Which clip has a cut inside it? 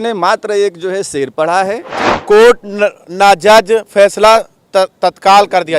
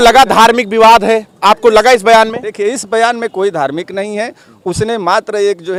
first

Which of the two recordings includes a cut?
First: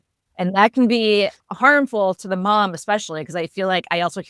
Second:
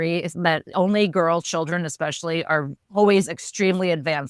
second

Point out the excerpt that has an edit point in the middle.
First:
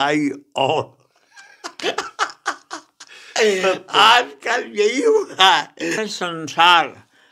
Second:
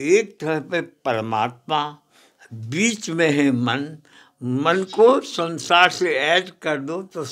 first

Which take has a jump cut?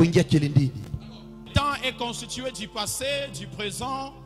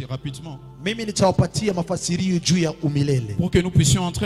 first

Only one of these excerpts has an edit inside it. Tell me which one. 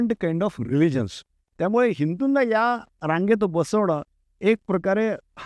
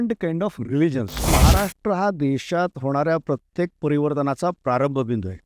second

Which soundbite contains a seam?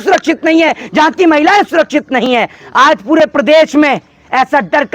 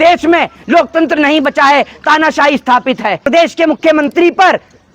second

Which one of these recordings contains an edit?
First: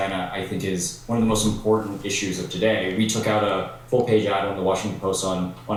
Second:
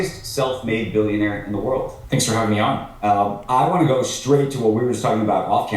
second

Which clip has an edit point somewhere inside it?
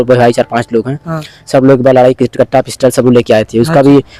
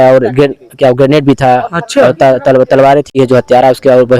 second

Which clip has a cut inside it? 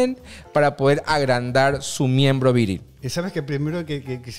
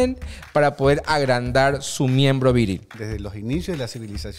second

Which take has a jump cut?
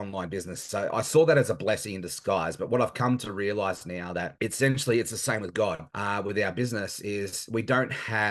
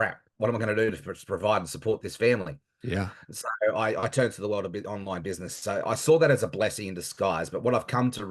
first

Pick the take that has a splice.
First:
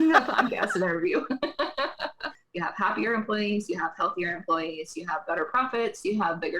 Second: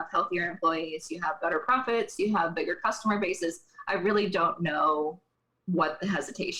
first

